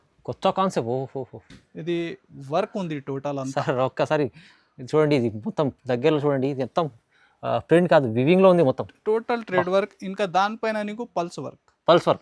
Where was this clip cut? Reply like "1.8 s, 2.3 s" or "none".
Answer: none